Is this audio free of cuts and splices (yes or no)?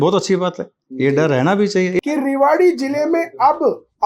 no